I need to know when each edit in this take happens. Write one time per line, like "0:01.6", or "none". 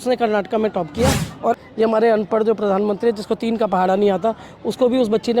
0:01.6